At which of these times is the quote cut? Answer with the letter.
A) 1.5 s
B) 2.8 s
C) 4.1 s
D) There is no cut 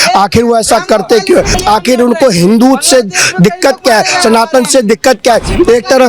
A